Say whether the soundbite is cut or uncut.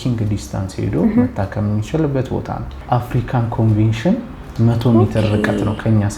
cut